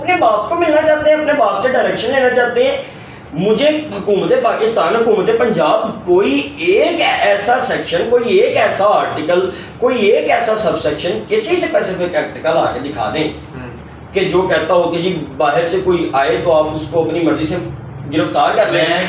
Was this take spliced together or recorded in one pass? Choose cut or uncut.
uncut